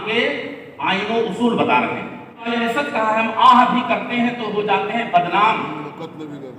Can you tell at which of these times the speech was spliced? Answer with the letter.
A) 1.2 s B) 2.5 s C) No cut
B